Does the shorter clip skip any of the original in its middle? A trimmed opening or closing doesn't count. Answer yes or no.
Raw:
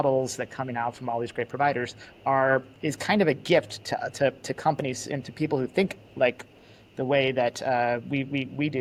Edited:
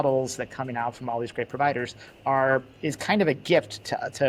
no